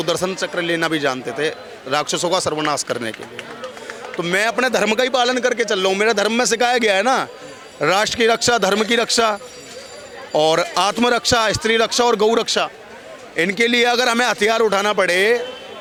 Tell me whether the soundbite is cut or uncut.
uncut